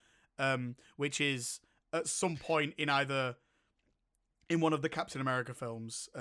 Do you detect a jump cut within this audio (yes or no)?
no